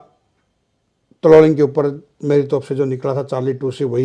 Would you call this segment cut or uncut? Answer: uncut